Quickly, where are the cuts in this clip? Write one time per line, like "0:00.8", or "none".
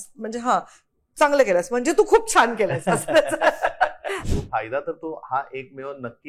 0:04.1